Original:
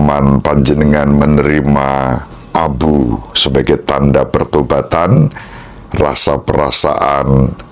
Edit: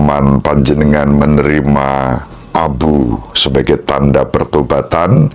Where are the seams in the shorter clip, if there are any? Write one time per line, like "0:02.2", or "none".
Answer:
none